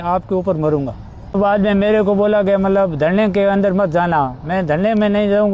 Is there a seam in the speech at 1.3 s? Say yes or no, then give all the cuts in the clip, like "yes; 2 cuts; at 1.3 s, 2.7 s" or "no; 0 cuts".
yes; 1 cut; at 1.3 s